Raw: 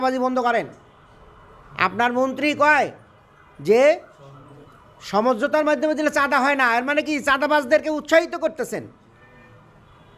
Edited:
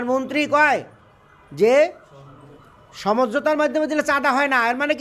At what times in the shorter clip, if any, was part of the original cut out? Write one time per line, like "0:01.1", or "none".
none